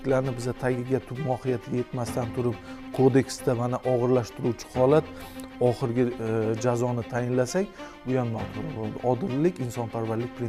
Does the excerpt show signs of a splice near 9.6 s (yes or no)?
no